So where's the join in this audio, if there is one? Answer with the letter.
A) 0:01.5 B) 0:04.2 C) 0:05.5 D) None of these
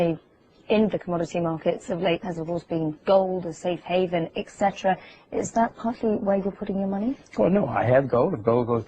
C